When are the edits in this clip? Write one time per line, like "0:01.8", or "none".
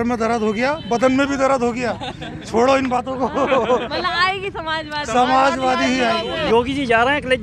0:06.4